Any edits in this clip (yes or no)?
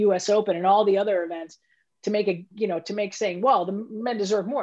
no